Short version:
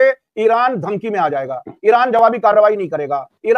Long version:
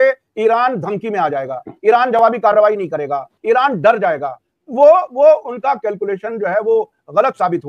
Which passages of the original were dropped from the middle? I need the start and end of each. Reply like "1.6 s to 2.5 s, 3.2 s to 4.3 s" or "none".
none